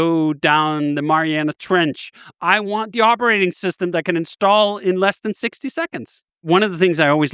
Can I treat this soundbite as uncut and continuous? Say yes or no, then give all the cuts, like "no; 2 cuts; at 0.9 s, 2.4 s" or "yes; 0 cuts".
no; 1 cut; at 6.4 s